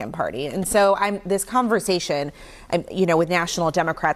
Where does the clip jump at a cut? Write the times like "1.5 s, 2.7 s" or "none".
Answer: none